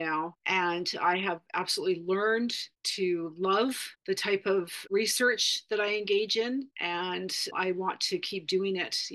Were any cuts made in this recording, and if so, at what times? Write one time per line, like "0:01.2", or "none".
0:07.5